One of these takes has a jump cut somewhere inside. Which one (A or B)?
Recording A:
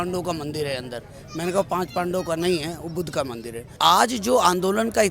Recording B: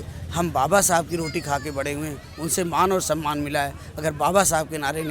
A